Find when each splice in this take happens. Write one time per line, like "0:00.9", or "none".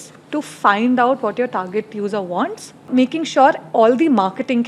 0:02.9